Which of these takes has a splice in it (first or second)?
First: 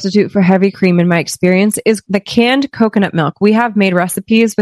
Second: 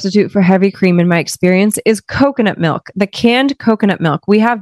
first